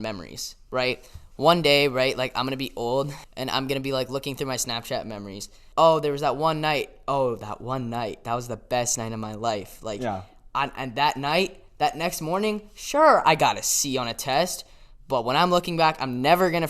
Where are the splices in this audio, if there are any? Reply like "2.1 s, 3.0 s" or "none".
3.2 s, 5.6 s